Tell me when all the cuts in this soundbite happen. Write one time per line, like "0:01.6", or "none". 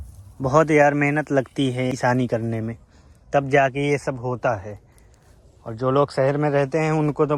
none